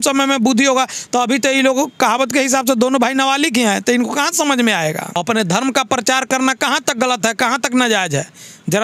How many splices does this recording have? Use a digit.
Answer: 1